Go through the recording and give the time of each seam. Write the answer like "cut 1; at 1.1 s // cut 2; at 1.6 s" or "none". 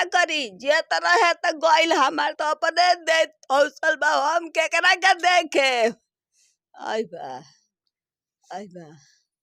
none